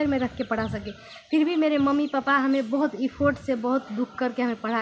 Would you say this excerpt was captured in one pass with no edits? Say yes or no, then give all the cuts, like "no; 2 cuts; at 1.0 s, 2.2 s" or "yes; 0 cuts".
yes; 0 cuts